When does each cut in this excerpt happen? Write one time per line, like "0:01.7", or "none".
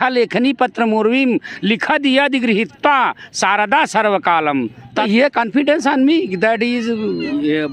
0:05.1